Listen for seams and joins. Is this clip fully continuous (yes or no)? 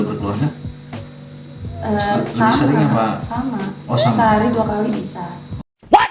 yes